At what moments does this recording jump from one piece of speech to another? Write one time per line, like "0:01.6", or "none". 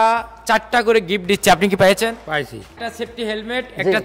none